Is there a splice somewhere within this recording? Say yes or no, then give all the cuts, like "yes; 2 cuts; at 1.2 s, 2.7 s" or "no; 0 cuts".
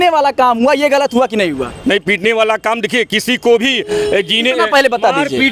no; 0 cuts